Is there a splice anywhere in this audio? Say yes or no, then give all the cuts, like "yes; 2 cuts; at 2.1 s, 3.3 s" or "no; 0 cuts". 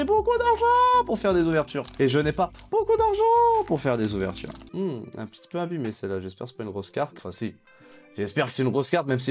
yes; 3 cuts; at 1.8 s, 4.5 s, 7.2 s